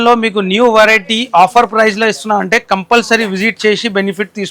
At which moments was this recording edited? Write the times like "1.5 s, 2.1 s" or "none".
none